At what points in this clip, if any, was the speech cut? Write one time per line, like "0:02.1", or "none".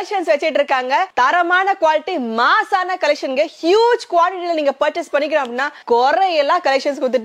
0:05.8